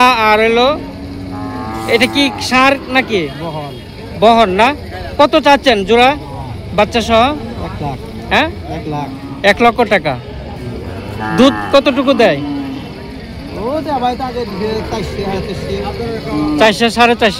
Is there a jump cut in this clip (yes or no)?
no